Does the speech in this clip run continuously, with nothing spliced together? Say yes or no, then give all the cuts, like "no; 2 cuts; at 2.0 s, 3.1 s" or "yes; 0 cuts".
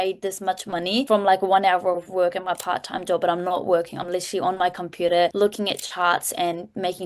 no; 2 cuts; at 1.1 s, 5.3 s